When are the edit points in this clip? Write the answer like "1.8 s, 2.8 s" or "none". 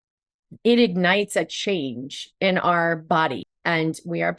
3.5 s